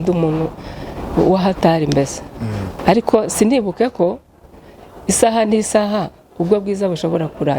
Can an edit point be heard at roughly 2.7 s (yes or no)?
yes